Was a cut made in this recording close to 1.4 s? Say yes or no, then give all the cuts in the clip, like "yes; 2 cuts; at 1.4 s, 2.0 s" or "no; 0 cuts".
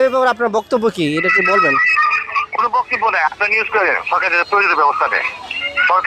no; 0 cuts